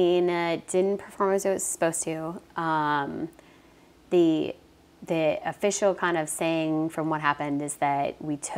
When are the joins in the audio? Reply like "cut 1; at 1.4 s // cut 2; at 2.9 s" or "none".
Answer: none